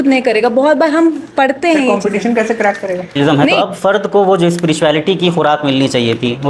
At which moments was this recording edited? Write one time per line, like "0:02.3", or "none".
0:03.2